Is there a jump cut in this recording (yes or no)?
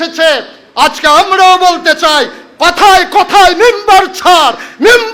no